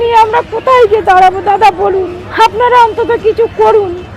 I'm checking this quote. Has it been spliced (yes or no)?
yes